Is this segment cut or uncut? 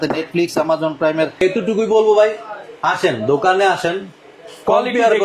cut